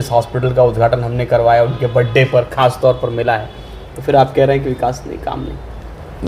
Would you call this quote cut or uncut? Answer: uncut